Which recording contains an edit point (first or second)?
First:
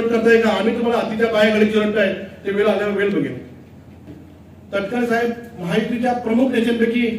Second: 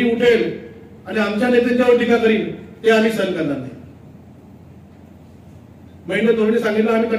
first